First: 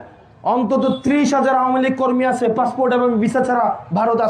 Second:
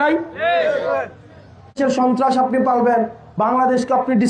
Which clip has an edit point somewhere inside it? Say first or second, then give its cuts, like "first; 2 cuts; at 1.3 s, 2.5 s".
second; 1 cut; at 1.8 s